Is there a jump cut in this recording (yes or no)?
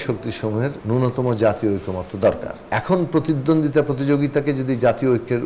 yes